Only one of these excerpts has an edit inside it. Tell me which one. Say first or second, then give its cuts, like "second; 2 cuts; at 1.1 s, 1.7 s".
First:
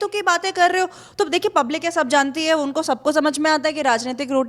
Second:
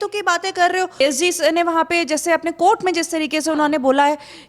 second; 1 cut; at 1.0 s